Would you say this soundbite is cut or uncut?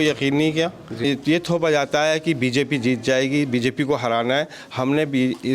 cut